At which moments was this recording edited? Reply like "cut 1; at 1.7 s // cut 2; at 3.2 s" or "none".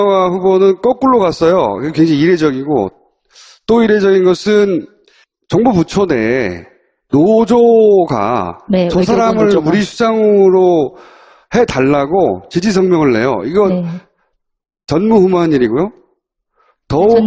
cut 1; at 11.3 s